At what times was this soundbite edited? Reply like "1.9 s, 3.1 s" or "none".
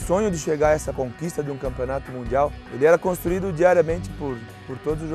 0.9 s, 2.6 s